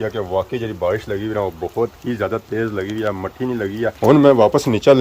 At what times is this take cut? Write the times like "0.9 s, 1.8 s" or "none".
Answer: 4.0 s